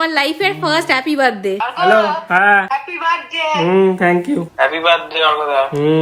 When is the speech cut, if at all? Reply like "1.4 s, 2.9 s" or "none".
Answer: 1.6 s, 4.5 s